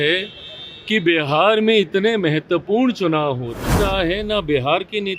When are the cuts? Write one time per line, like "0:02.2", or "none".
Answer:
0:03.7

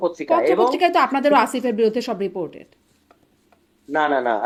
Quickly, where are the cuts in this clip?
none

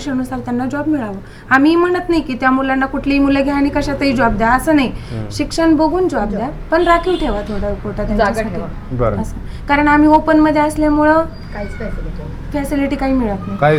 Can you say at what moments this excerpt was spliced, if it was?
none

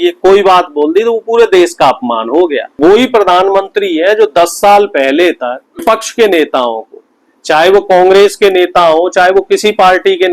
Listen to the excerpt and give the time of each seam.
0:02.7
0:05.8

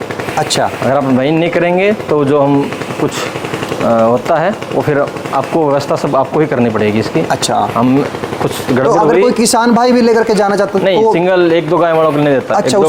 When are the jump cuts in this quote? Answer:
none

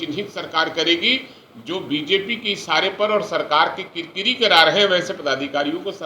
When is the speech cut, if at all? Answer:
none

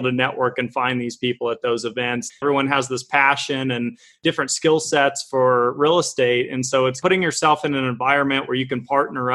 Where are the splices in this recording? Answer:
0:02.4
0:07.0

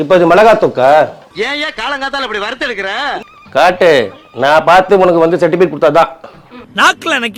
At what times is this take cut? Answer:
0:03.2

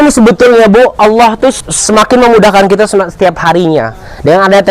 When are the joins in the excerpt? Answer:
0:01.6

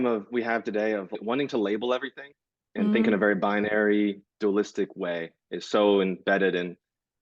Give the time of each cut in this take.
0:01.2

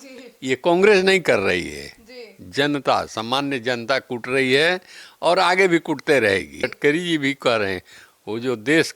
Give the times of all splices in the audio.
0:06.7

